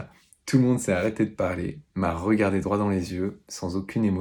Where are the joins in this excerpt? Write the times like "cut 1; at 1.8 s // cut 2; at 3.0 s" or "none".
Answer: none